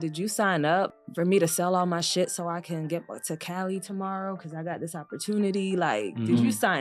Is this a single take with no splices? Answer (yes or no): no